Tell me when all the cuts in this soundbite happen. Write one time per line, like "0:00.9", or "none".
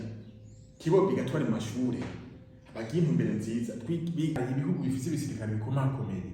0:04.4